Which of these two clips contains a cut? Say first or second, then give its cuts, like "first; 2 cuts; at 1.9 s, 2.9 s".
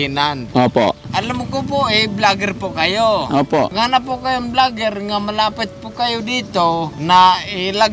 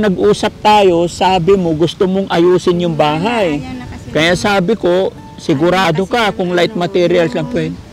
first; 3 cuts; at 1.1 s, 3.7 s, 6.9 s